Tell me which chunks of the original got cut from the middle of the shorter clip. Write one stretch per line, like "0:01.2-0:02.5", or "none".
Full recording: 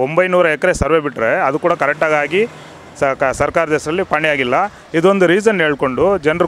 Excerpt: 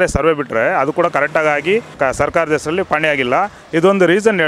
0:02.6-0:03.2